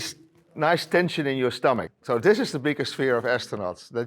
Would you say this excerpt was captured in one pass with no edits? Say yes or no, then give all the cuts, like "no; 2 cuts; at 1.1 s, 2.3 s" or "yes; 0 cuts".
no; 1 cut; at 1.9 s